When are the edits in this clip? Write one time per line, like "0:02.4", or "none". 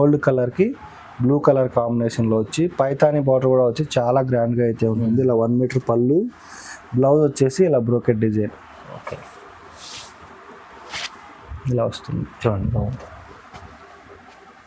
none